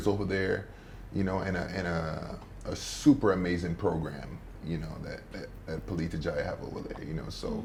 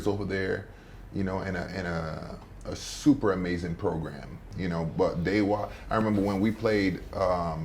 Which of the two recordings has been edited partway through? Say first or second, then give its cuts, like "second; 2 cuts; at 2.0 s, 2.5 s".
second; 1 cut; at 4.4 s